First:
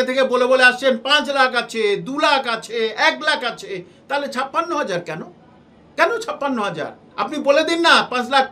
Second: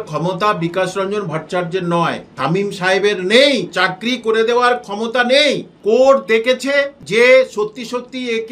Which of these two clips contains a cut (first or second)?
second